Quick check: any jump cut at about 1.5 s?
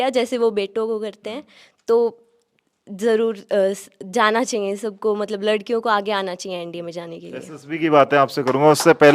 no; 0 cuts

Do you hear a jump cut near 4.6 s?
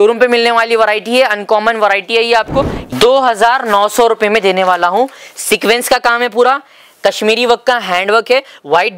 no; 1 cut; at 2.8 s

